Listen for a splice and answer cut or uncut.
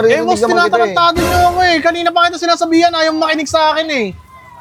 uncut